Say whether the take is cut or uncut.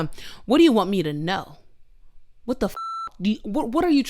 uncut